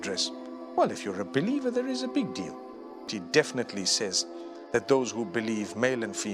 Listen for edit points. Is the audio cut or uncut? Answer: cut